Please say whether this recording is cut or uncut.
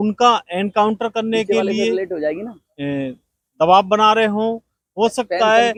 uncut